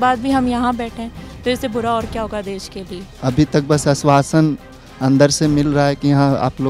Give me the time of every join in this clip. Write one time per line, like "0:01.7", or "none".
0:03.1